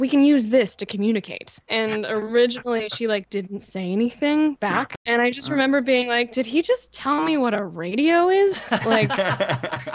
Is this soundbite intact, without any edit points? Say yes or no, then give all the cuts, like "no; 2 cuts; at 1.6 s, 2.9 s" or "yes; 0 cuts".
yes; 0 cuts